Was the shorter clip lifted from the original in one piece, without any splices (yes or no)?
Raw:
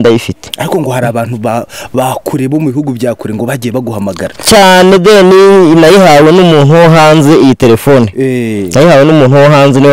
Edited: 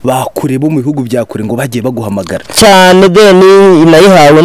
yes